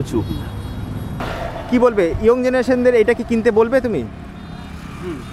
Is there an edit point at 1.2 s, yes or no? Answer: yes